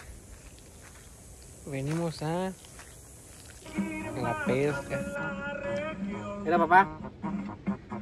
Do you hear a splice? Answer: yes; 1 cut; at 4.7 s

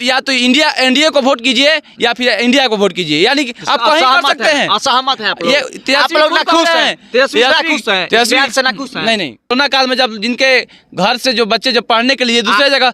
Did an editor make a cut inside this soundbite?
yes; 1 cut; at 9.5 s

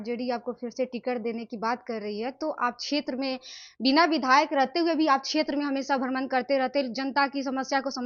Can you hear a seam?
no; 0 cuts

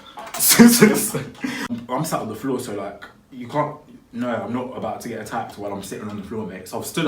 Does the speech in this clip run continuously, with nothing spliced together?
no; 1 cut; at 1.7 s

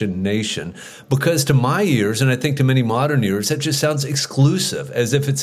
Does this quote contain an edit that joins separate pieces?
no; 0 cuts

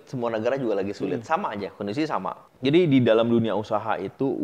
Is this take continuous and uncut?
no; 1 cut; at 2.5 s

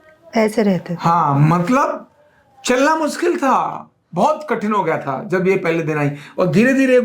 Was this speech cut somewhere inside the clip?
no; 0 cuts

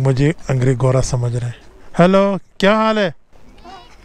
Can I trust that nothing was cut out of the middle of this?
yes; 0 cuts

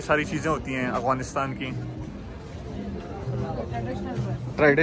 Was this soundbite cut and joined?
no; 0 cuts

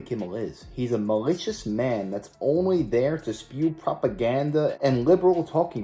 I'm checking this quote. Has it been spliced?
no; 0 cuts

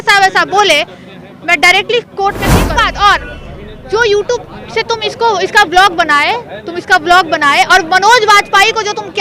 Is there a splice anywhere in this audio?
yes; 1 cut; at 2.8 s

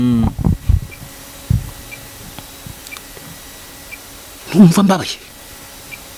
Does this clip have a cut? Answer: no; 0 cuts

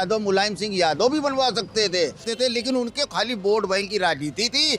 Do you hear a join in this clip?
yes; 1 cut; at 2.2 s

